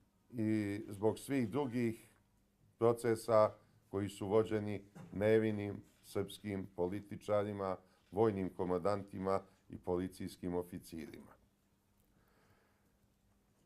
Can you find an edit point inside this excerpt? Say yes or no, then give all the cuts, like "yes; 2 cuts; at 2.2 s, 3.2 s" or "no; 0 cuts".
yes; 1 cut; at 3.2 s